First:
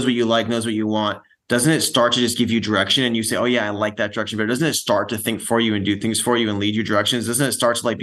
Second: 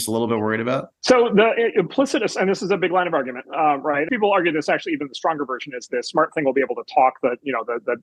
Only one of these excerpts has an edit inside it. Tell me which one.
second; 2 cuts; at 0.9 s, 4.1 s

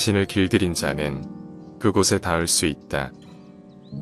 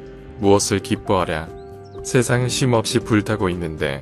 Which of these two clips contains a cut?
first; 1 cut; at 3.1 s

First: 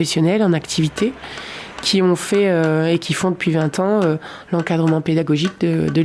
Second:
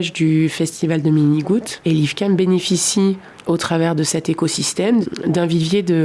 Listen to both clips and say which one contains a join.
second; 3 cuts; at 1.7 s, 3.3 s, 5.1 s

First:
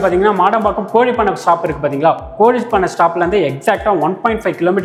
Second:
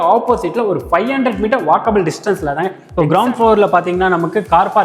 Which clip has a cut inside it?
second; 1 cut; at 2.8 s

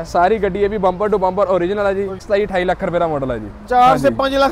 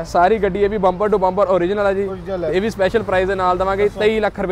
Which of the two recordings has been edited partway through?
first; 1 cut; at 2.2 s

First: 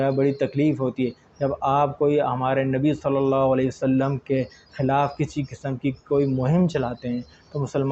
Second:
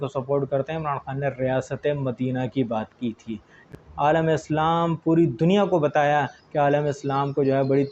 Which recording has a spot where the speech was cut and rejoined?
second; 1 cut; at 3.7 s

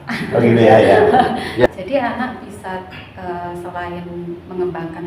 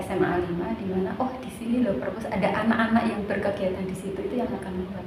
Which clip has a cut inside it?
first; 1 cut; at 1.7 s

